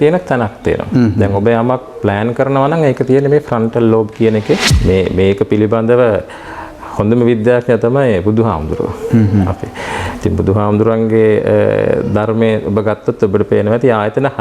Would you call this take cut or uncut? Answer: cut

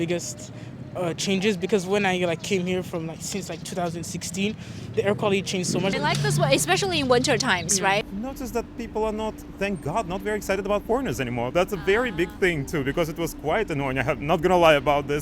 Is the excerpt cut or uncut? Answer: uncut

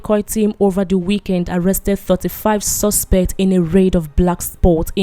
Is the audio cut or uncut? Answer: uncut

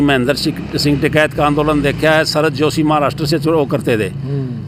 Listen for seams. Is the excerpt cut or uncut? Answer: uncut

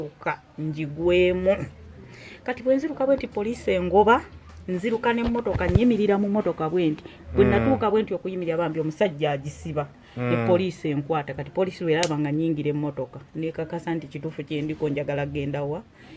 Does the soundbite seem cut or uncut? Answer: uncut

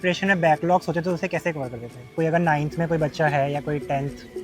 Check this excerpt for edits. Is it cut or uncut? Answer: cut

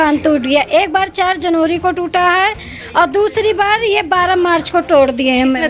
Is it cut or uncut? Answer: uncut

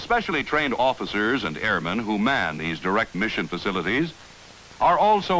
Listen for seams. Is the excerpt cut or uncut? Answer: cut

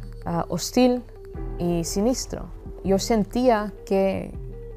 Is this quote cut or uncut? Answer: cut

